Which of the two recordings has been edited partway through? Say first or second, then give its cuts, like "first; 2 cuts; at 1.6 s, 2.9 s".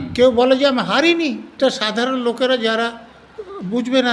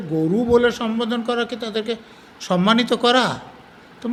first; 1 cut; at 1.6 s